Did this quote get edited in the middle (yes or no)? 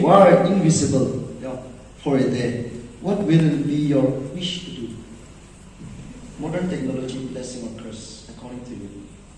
yes